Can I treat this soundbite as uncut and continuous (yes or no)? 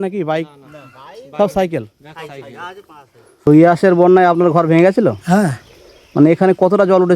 no